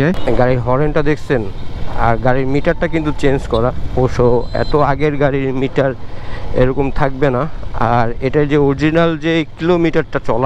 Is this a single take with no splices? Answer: yes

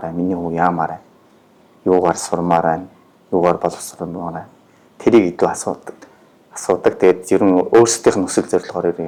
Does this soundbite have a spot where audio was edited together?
no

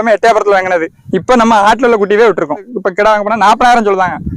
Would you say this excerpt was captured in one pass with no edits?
yes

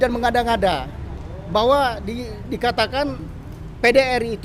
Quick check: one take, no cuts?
yes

